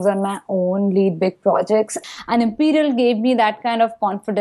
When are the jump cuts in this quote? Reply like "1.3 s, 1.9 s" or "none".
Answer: 2.0 s

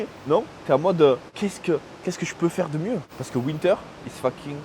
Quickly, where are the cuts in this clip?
1.3 s, 3.2 s

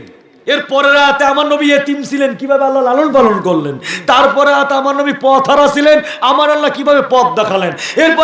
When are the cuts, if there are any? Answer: none

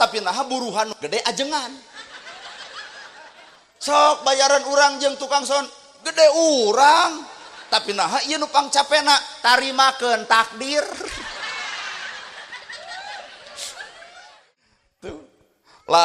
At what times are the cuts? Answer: 14.3 s

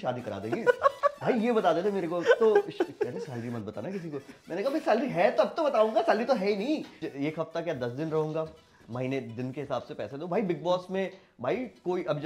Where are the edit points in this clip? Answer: 7.0 s

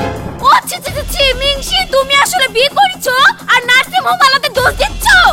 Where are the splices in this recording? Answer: none

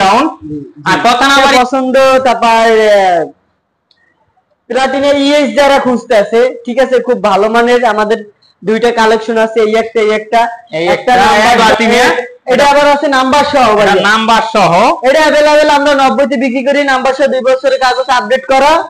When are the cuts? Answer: 1.5 s, 11.6 s

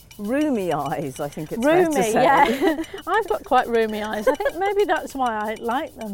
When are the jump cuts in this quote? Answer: none

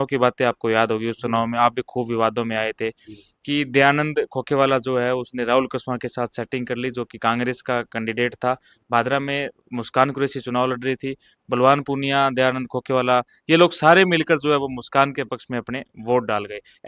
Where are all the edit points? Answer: none

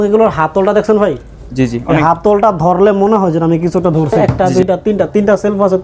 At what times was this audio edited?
4.3 s

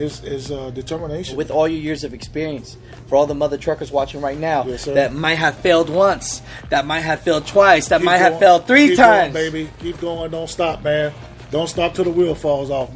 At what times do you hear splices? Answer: 1.4 s

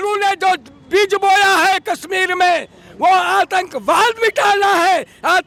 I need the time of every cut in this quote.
none

